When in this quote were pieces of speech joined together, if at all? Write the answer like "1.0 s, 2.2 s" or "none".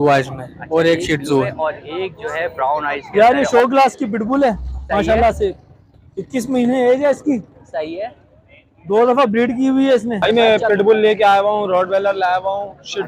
3.1 s, 10.2 s